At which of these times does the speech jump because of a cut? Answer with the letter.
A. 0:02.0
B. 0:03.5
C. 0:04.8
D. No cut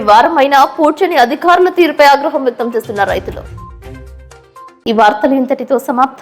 D